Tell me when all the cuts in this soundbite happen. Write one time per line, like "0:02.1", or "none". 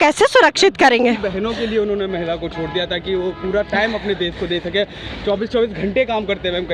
none

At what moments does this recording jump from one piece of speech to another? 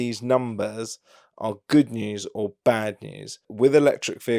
0:03.5

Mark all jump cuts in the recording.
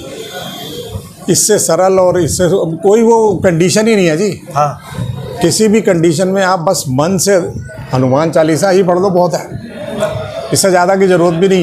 none

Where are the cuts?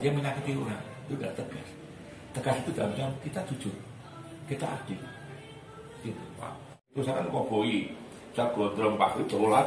0:06.9

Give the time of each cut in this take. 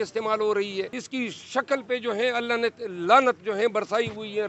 0:01.0

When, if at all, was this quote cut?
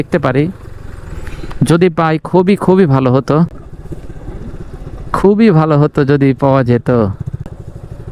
none

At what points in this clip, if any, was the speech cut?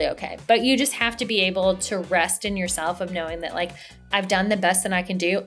none

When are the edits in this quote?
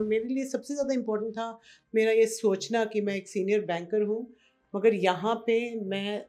none

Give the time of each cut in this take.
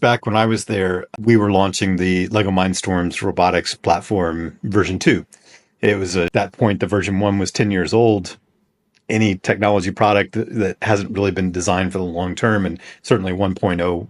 0:01.1
0:06.3

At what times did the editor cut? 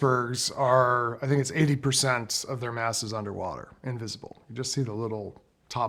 none

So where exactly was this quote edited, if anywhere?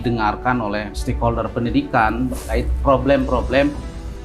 0:01.0

